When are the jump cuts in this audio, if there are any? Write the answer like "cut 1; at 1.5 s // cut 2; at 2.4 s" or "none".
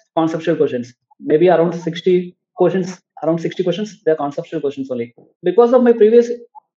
cut 1; at 5.3 s